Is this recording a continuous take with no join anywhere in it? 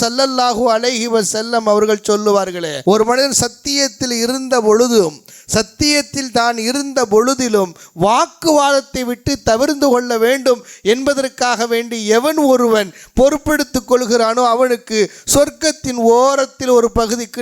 no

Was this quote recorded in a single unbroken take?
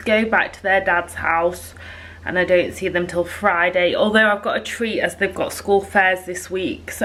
yes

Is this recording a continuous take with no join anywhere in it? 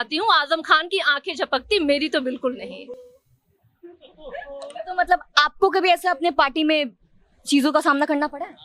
yes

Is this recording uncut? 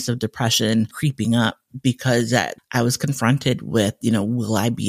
no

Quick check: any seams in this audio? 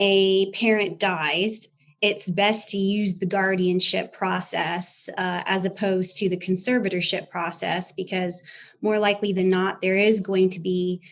no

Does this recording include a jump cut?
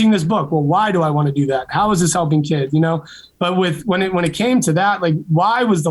no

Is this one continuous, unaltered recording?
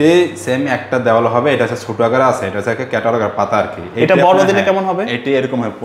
yes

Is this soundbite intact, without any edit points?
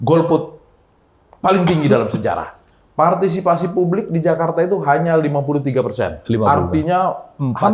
yes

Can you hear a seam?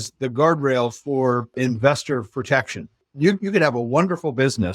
yes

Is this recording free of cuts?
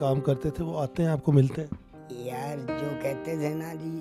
no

